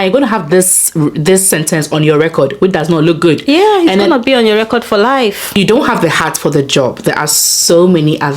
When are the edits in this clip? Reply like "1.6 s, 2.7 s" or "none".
5.5 s